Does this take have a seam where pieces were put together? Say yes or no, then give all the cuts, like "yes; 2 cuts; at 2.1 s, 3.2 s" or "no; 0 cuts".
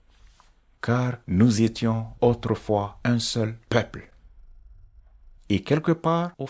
no; 0 cuts